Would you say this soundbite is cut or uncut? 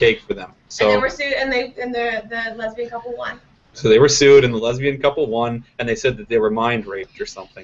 cut